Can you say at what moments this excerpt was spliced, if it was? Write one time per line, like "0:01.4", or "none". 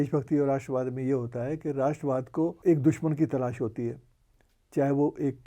0:02.6